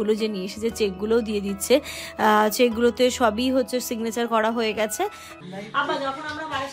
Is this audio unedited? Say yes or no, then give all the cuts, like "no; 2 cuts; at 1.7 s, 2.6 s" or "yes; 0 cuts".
no; 1 cut; at 5.3 s